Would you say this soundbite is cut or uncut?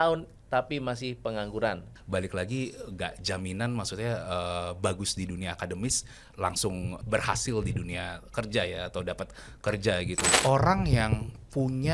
cut